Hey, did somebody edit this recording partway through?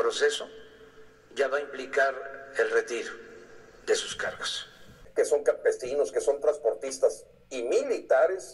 yes; 1 cut; at 4.9 s

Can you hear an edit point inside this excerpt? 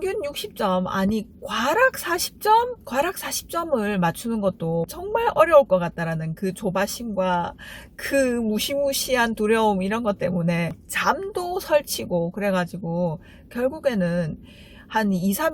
no; 0 cuts

